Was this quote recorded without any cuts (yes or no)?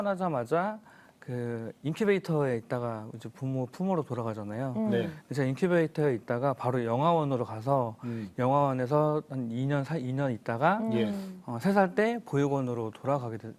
yes